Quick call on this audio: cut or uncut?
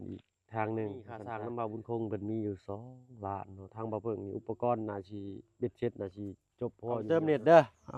cut